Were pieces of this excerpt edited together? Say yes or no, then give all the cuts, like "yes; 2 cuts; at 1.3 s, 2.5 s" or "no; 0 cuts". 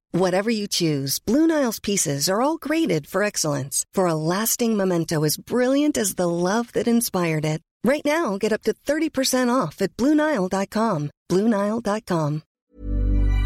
yes; 1 cut; at 12.5 s